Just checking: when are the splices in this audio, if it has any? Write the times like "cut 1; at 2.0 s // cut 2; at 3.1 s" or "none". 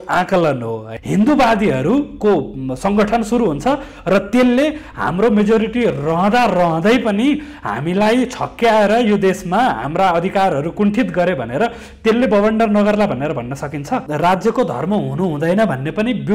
cut 1; at 0.9 s // cut 2; at 14.1 s